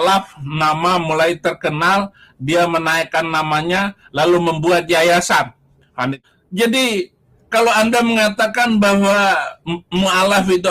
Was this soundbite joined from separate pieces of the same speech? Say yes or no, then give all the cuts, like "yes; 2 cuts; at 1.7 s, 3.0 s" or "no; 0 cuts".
yes; 1 cut; at 6.2 s